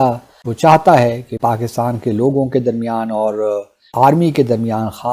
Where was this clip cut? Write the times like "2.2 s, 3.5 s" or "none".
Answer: 1.4 s